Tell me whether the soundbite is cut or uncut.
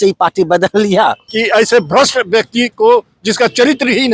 cut